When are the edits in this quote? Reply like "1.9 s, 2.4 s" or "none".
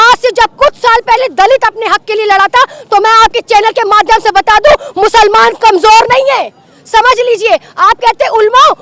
none